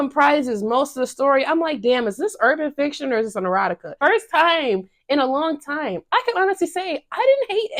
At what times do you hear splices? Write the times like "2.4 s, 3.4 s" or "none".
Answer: 4.0 s

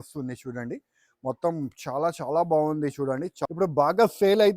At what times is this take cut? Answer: 3.4 s

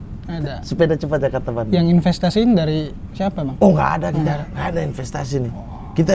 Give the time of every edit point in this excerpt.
none

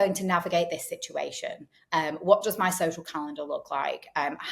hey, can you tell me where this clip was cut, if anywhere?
none

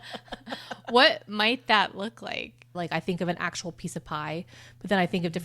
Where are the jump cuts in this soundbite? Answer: 2.8 s

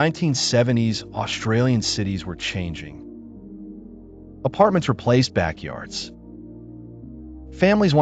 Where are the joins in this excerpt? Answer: 2.8 s, 4.4 s

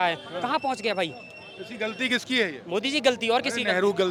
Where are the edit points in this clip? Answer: none

